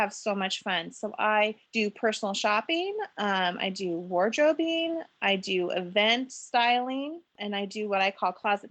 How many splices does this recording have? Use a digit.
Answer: 2